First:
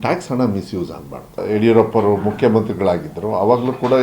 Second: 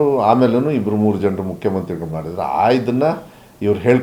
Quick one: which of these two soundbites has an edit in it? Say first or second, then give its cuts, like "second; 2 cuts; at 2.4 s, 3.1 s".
first; 1 cut; at 1.4 s